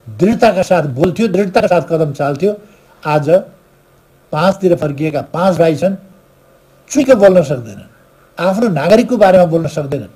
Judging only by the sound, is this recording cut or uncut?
uncut